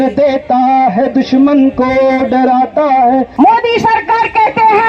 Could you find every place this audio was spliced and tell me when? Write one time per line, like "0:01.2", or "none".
0:03.3